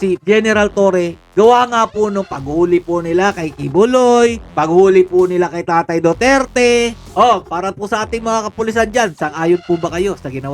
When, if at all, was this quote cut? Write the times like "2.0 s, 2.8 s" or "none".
7.0 s

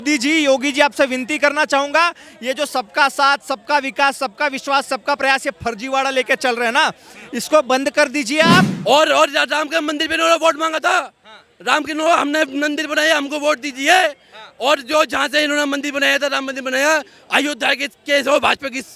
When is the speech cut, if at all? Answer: 8.7 s

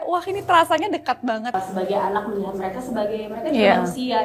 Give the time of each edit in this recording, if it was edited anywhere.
1.5 s

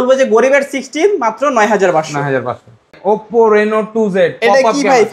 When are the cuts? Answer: 2.9 s

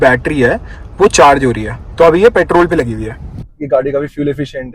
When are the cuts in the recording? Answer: 3.4 s

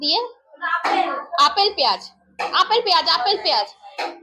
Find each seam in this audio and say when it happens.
none

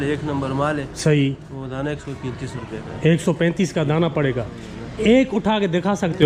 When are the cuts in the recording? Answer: none

